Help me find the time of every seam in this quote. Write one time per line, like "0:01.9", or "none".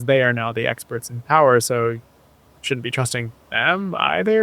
none